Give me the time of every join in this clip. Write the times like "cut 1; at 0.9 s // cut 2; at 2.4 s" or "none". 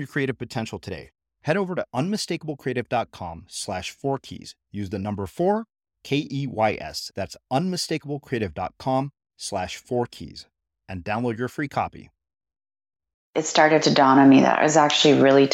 cut 1; at 13.4 s